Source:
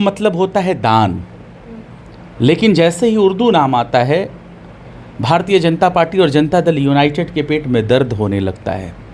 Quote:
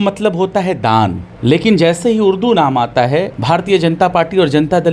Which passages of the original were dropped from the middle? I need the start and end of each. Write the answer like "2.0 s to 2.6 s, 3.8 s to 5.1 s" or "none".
1.3 s to 2.2 s, 4.3 s to 5.2 s